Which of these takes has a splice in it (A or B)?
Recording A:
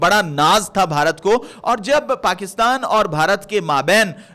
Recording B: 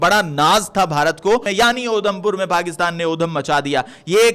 B